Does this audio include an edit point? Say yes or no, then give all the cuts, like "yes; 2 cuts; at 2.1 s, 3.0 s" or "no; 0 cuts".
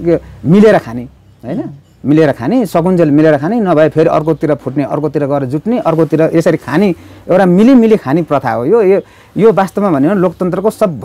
no; 0 cuts